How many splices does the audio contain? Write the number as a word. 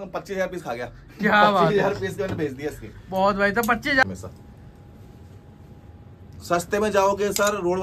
one